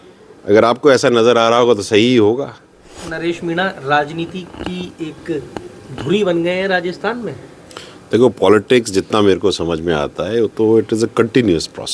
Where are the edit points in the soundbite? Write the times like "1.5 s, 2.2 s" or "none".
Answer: 3.0 s